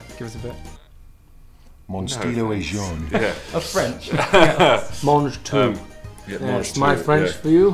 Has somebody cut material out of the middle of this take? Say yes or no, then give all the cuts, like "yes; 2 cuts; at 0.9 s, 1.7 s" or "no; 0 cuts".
no; 0 cuts